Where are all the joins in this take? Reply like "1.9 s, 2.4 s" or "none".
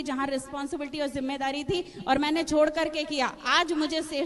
none